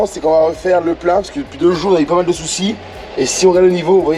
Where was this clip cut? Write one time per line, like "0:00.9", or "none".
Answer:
none